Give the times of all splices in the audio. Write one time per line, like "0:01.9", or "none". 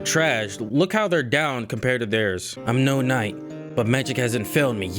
0:02.5